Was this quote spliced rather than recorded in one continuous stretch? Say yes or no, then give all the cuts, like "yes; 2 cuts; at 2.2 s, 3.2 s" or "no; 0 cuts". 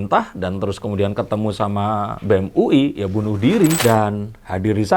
yes; 1 cut; at 3.8 s